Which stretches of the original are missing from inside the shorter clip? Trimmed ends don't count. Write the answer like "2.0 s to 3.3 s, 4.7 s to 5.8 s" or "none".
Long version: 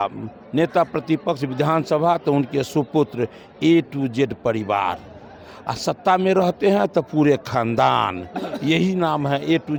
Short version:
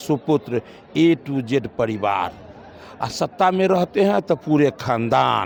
none